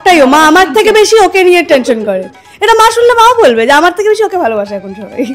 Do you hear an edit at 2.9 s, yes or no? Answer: no